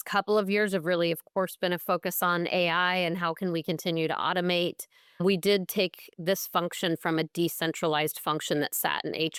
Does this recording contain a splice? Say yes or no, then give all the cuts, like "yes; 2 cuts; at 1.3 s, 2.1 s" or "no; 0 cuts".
no; 0 cuts